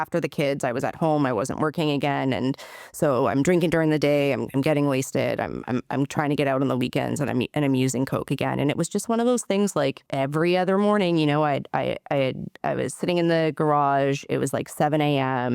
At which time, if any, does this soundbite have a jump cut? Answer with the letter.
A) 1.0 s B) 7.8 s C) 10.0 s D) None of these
C